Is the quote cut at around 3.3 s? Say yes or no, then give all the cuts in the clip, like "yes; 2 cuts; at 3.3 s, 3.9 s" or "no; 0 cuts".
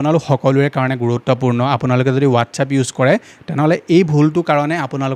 no; 0 cuts